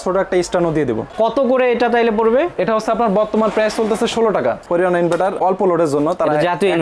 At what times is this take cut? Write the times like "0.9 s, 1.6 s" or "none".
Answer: 1.1 s, 4.6 s